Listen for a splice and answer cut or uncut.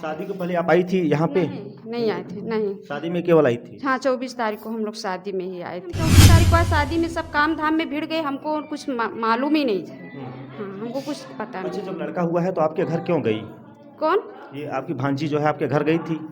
cut